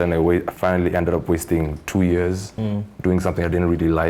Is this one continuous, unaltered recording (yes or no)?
yes